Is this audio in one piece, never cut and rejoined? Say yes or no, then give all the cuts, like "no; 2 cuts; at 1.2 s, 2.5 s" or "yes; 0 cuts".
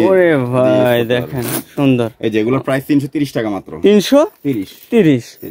yes; 0 cuts